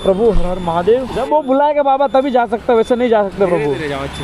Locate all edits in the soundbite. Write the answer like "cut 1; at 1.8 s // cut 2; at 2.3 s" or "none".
cut 1; at 1.2 s